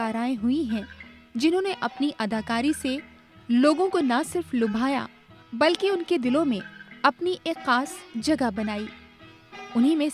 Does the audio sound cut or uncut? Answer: uncut